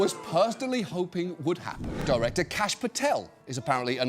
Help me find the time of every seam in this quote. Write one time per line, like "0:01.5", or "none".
0:01.9